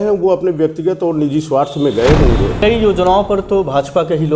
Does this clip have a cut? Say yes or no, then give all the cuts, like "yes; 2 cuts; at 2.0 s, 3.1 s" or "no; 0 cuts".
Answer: yes; 1 cut; at 2.5 s